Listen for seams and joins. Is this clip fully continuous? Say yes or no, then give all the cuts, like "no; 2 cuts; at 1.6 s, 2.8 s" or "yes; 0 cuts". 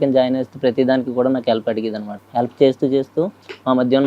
no; 1 cut; at 2.1 s